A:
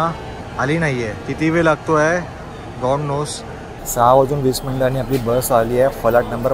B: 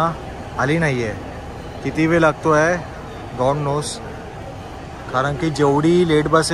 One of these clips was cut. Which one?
A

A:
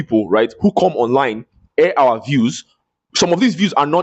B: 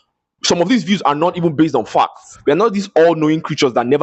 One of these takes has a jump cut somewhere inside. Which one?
B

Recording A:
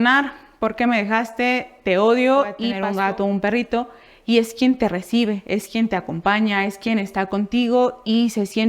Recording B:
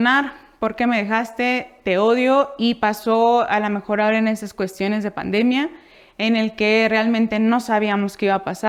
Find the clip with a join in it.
A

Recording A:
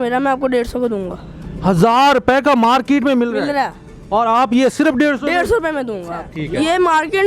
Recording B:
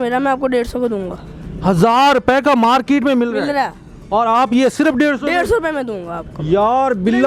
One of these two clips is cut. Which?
A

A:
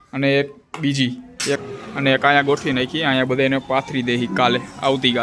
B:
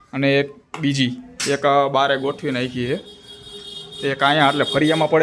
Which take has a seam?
A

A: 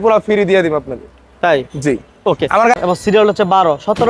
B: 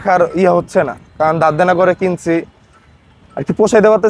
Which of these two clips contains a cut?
A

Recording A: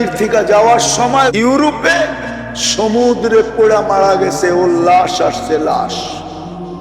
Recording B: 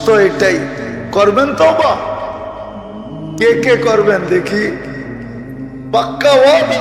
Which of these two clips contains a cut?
A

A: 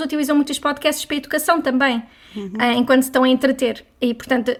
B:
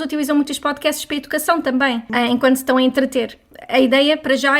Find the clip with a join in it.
B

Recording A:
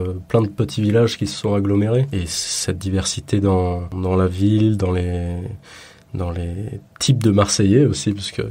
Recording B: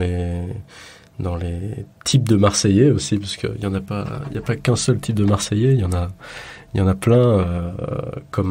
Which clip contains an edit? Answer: A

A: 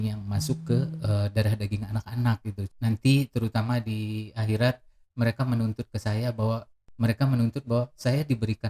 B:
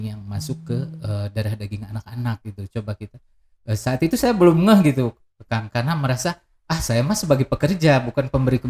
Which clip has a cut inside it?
A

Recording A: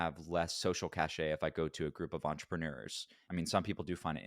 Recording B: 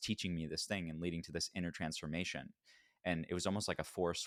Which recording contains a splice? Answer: A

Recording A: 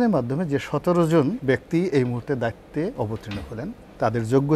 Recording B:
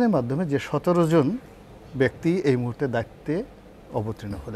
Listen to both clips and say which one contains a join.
A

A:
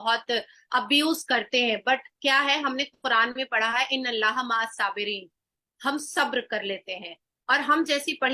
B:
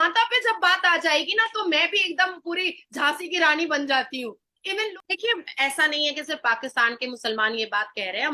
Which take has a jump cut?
B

